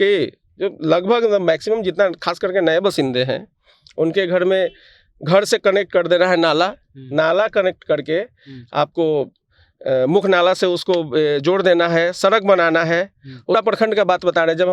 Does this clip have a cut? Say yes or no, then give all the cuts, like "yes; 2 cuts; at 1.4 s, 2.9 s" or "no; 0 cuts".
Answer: yes; 1 cut; at 13.5 s